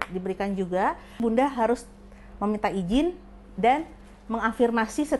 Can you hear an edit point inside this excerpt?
yes; 1 cut; at 1.2 s

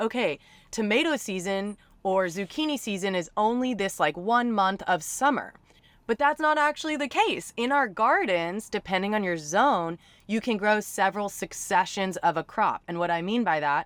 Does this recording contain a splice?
no; 0 cuts

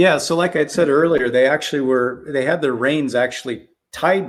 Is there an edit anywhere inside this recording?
no; 0 cuts

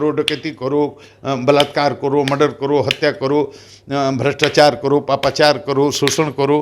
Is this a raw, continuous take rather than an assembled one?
yes; 0 cuts

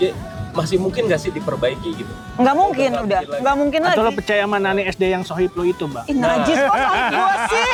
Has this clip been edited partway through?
no; 0 cuts

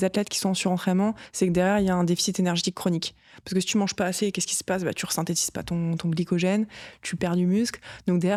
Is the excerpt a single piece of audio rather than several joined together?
yes; 0 cuts

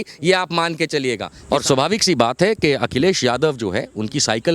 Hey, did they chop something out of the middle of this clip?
yes; 1 cut; at 1.3 s

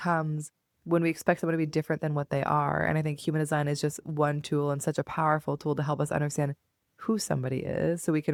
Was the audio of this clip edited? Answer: no; 0 cuts

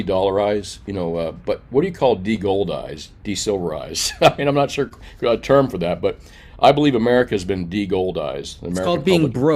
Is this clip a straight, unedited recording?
yes; 0 cuts

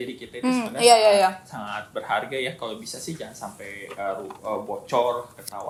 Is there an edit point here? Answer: no; 0 cuts

